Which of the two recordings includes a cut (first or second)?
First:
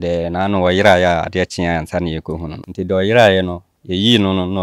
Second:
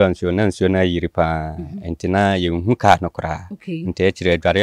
first